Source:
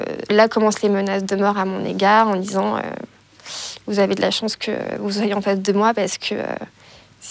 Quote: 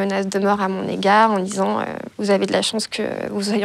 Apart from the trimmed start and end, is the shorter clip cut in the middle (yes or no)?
yes